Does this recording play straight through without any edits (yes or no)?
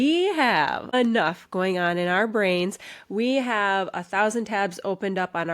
no